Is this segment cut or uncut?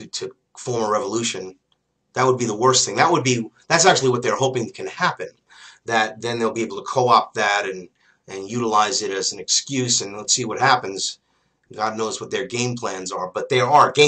uncut